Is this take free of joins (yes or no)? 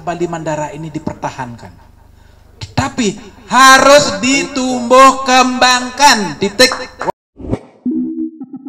no